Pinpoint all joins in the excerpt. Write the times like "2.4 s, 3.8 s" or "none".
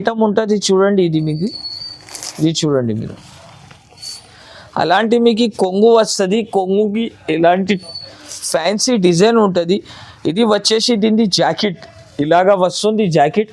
none